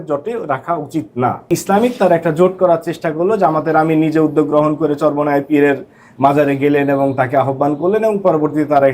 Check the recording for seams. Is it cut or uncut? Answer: cut